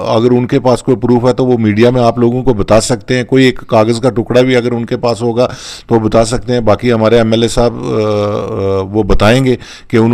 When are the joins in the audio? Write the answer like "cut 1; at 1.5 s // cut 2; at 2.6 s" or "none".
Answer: none